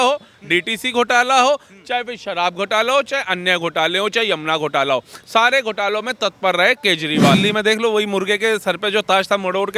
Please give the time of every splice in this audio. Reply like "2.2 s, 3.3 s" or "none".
7.4 s